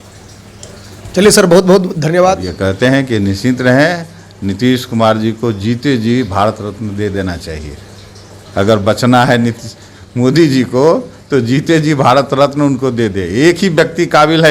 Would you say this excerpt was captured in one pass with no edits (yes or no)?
no